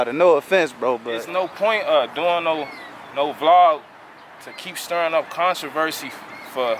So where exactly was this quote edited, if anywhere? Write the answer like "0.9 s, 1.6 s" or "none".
1.1 s